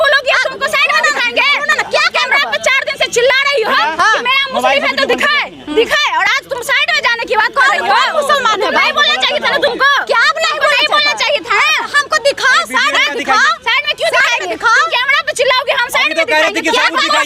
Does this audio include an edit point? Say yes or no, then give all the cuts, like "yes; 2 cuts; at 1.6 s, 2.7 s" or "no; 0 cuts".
no; 0 cuts